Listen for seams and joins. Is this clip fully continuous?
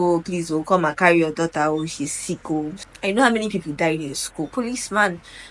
no; 2 cuts; at 2.8 s, 4.5 s

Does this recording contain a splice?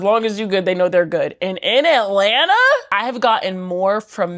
yes; 1 cut; at 2.9 s

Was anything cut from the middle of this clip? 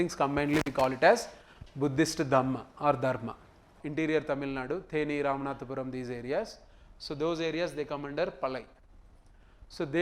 yes; 1 cut; at 3.8 s

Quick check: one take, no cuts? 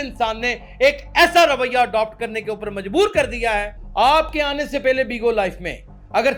no; 1 cut; at 3.8 s

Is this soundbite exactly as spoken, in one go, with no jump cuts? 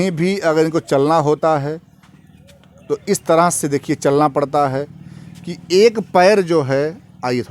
yes; 0 cuts

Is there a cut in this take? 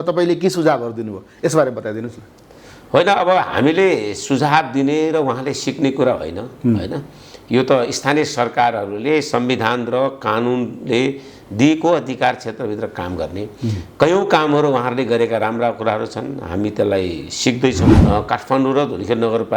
yes; 1 cut; at 17.9 s

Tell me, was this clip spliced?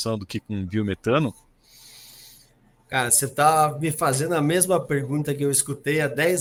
no; 0 cuts

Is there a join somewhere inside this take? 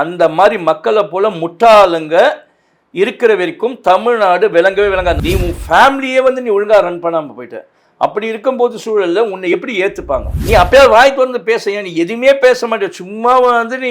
yes; 2 cuts; at 5.2 s, 10.3 s

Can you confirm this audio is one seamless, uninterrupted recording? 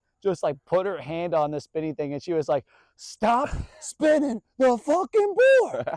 yes; 0 cuts

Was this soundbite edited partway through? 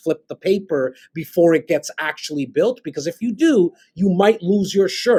no; 0 cuts

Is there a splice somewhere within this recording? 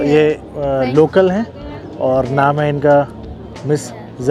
no; 0 cuts

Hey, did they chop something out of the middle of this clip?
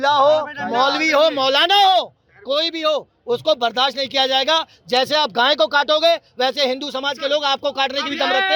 no; 0 cuts

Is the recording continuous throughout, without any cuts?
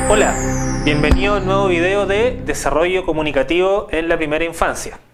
yes; 0 cuts

